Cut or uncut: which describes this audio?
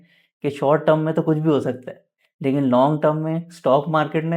uncut